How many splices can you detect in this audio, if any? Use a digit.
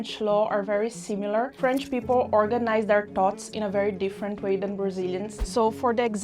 2